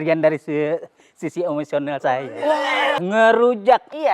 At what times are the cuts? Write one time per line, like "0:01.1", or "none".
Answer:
0:03.0